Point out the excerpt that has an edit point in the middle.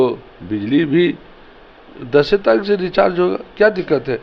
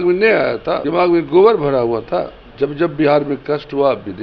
second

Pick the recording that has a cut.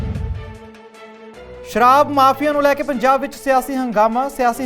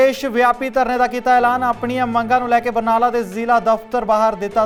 first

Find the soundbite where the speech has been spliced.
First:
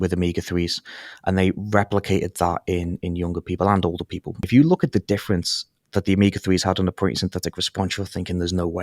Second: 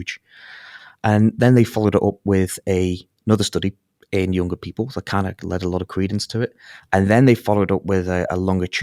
first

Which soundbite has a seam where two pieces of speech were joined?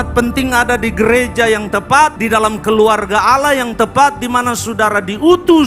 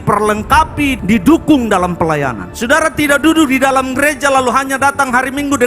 second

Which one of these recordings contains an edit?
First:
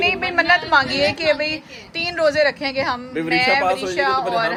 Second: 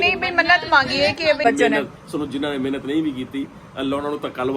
second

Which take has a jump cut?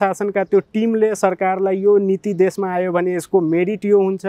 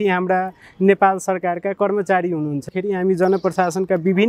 second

